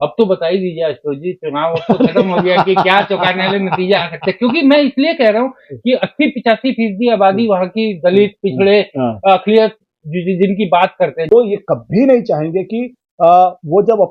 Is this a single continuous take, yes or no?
no